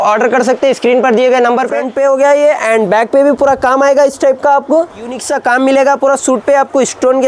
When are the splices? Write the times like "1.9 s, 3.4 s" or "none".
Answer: 1.8 s, 5.2 s